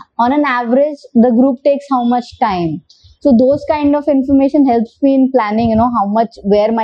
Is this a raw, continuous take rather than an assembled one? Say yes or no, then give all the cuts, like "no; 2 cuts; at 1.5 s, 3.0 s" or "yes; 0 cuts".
yes; 0 cuts